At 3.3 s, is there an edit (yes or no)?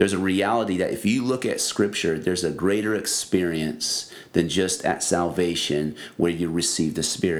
no